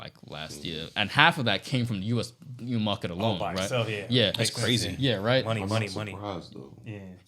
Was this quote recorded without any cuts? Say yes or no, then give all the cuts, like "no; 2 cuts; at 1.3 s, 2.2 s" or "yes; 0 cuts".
yes; 0 cuts